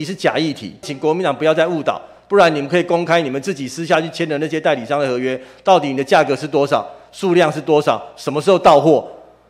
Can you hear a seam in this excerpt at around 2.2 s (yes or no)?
no